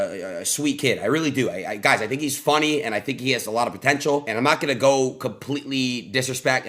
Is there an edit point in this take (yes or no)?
yes